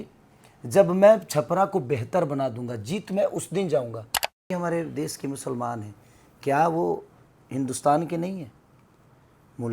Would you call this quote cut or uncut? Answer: cut